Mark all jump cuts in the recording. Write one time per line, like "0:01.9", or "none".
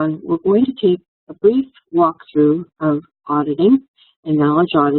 0:02.9